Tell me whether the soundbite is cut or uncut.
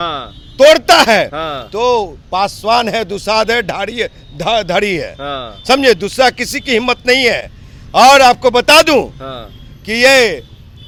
uncut